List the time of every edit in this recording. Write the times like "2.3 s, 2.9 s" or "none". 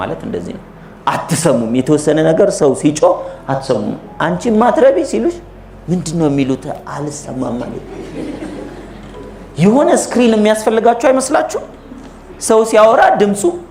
none